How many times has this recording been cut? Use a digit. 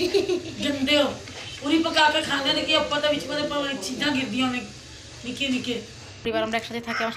1